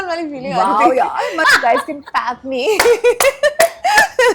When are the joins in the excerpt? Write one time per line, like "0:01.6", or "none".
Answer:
0:01.4